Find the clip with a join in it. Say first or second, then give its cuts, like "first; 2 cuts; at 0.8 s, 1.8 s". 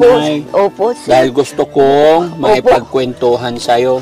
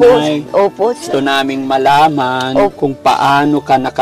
second; 2 cuts; at 1.0 s, 2.7 s